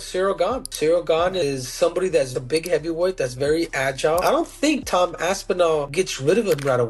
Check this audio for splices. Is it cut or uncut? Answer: uncut